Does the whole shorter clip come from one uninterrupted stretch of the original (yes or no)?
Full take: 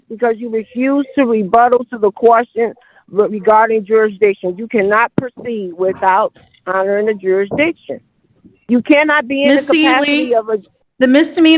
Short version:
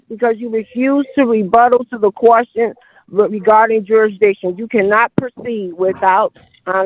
yes